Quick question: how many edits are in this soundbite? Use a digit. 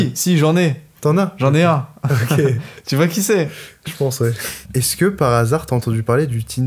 1